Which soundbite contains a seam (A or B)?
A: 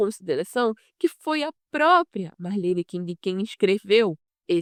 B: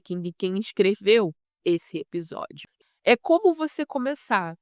B